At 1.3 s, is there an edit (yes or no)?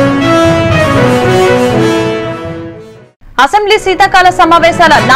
yes